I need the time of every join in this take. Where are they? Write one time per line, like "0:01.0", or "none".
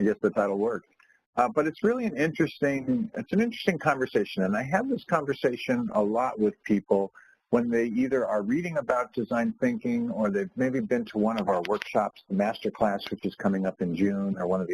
0:11.8